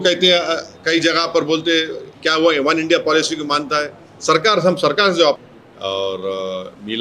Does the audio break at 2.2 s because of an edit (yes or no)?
no